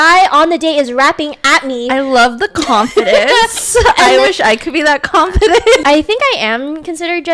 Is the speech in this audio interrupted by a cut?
yes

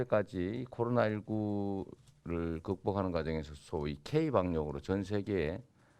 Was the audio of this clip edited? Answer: no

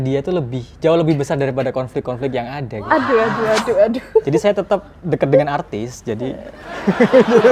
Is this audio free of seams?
yes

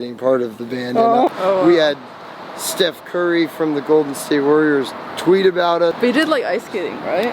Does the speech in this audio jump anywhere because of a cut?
yes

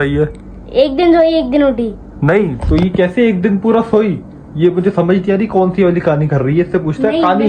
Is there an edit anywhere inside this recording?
yes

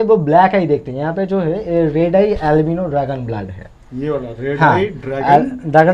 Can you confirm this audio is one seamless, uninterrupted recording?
yes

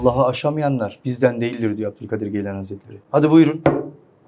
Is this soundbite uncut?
yes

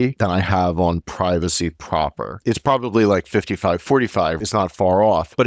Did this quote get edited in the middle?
yes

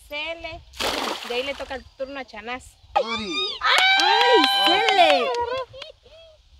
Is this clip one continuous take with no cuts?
no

